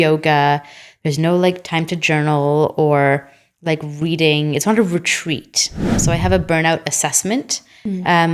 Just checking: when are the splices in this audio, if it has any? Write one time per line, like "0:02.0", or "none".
0:06.0